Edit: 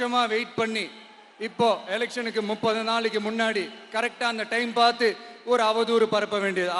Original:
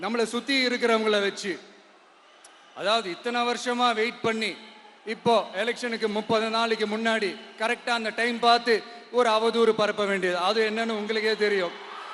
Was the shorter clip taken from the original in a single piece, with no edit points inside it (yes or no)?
yes